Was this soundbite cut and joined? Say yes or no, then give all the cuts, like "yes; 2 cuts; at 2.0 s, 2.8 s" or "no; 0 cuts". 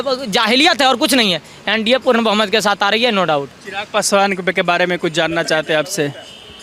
no; 0 cuts